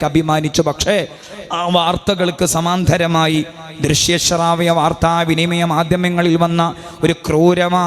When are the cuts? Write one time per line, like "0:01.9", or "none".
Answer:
none